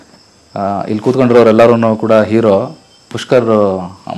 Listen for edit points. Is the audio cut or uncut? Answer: uncut